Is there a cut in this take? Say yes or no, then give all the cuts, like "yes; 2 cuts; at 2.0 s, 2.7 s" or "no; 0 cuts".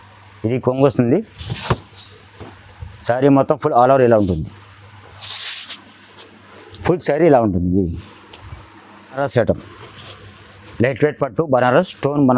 yes; 1 cut; at 9.2 s